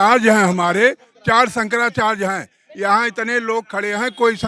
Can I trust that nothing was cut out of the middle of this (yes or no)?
yes